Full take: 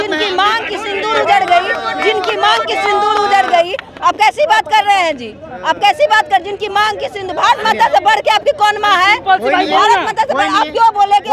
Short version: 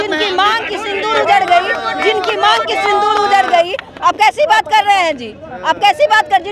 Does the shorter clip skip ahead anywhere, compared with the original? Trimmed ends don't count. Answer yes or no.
no